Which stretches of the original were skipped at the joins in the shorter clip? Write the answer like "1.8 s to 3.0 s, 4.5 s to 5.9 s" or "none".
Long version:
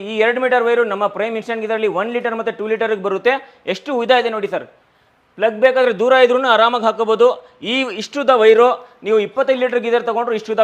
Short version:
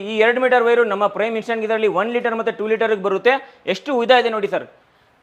none